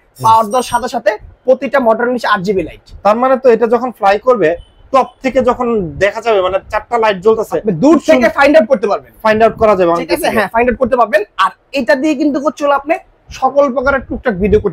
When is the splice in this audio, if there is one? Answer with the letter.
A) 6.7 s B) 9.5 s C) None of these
C